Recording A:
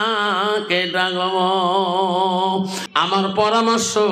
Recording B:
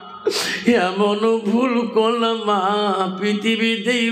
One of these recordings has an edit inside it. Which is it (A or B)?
A